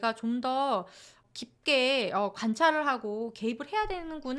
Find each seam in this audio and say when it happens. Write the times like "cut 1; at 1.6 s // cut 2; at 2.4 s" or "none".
cut 1; at 1.2 s